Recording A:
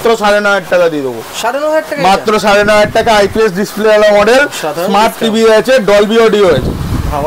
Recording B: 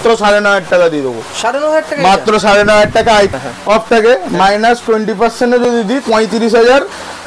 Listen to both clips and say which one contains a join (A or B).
B